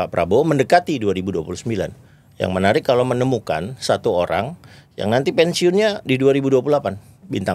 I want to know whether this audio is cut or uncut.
uncut